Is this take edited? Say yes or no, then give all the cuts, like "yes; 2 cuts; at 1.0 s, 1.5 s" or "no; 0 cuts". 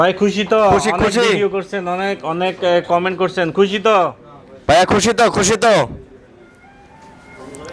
no; 0 cuts